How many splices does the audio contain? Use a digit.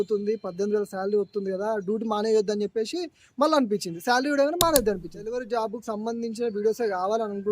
1